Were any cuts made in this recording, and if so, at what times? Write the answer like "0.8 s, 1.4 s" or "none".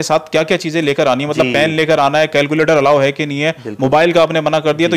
none